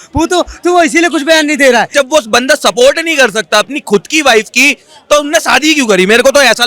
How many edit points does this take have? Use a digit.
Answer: 1